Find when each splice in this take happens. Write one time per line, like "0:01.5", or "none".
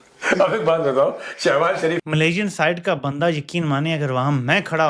0:02.0